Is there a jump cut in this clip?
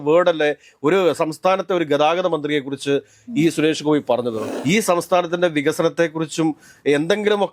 yes; 1 cut; at 4.5 s

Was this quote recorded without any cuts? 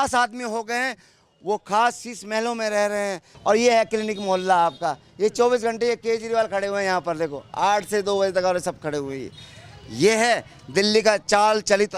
no; 1 cut; at 3.3 s

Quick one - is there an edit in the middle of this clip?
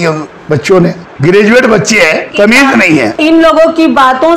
yes; 3 cuts; at 1.1 s, 2.3 s, 3.2 s

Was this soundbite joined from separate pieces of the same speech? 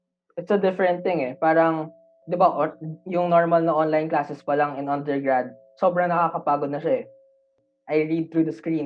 yes; 2 cuts; at 2.1 s, 7.7 s

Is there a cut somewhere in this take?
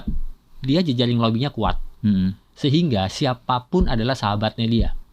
no; 0 cuts

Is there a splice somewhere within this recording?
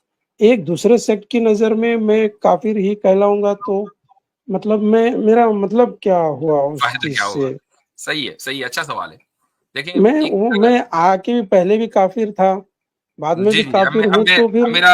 no; 0 cuts

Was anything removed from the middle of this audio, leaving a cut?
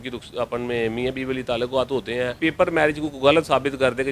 yes; 1 cut; at 2.4 s

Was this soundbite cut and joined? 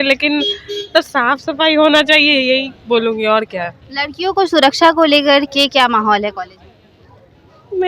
no; 0 cuts

